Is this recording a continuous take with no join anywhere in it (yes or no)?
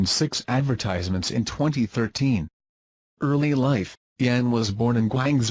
yes